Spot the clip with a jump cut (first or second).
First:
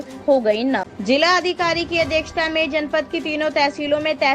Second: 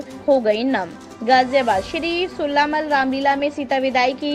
first